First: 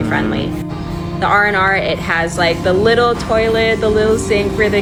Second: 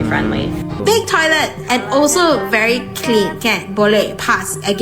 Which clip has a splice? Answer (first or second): second